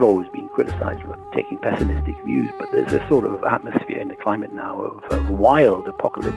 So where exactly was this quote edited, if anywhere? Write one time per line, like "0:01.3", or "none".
0:01.1

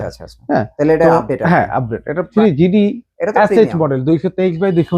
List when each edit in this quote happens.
0:02.3

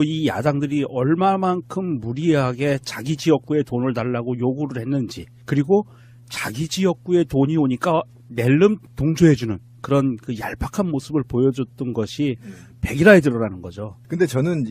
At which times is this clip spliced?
none

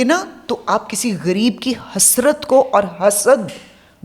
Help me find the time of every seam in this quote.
none

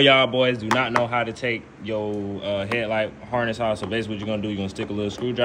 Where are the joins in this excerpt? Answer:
none

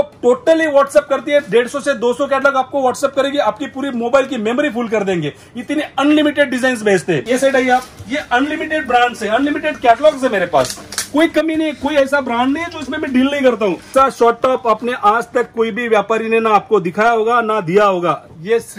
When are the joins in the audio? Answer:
0:07.2
0:13.9

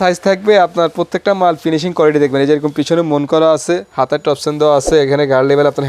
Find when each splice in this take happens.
none

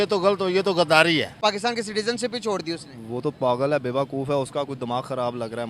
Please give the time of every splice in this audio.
0:01.3

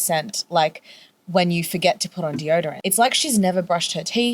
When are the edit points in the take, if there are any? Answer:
0:02.8

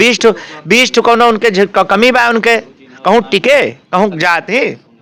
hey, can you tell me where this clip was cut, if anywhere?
none

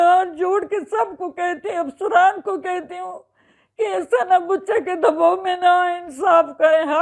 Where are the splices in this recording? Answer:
none

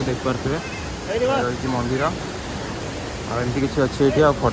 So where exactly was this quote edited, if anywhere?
none

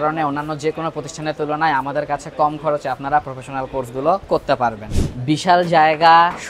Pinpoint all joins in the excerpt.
none

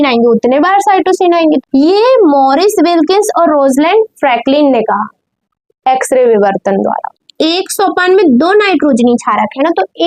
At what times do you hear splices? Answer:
0:01.6
0:07.2

